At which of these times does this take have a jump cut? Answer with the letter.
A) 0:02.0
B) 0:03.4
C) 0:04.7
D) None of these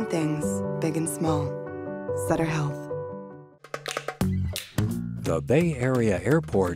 B